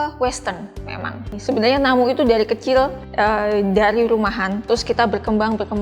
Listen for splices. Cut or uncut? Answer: cut